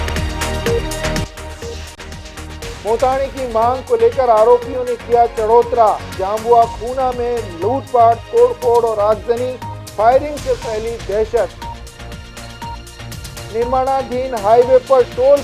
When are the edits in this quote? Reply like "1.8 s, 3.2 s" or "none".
1.2 s

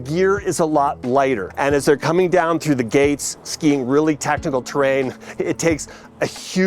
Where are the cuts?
1.5 s

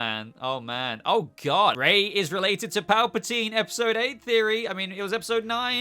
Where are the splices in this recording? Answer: 1.7 s

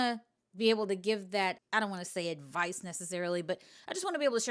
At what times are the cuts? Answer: 1.6 s

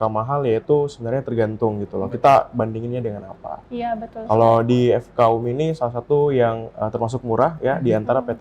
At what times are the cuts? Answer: none

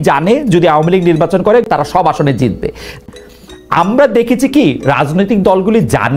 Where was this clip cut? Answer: 1.7 s, 3.1 s

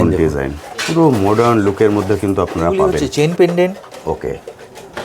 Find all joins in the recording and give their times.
3.0 s

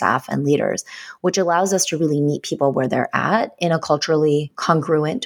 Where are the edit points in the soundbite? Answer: none

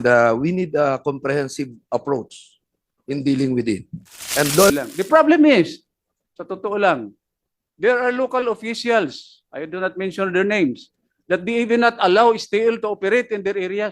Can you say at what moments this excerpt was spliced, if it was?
4.7 s

